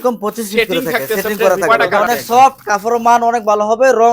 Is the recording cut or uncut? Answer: cut